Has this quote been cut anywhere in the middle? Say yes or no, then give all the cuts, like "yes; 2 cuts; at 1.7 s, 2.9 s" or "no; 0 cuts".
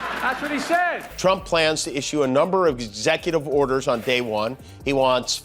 yes; 1 cut; at 1.0 s